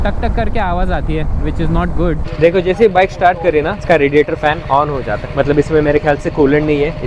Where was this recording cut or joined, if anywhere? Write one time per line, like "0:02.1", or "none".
0:02.3